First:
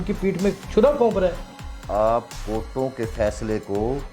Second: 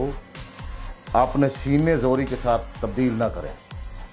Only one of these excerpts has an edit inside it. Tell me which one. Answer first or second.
first